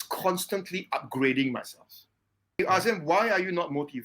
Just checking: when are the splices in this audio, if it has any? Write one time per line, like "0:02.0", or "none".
0:02.6